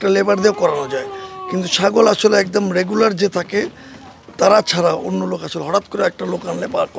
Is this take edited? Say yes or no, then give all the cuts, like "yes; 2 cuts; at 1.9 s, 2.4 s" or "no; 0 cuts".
no; 0 cuts